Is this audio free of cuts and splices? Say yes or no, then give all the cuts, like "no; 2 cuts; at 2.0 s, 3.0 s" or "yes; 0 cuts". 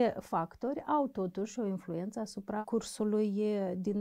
no; 1 cut; at 2.6 s